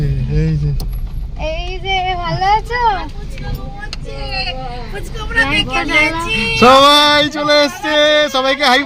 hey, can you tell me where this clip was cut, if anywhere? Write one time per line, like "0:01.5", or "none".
none